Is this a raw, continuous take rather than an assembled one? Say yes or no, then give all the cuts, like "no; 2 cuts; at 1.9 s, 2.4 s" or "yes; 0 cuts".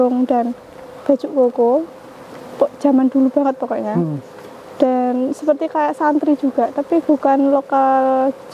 yes; 0 cuts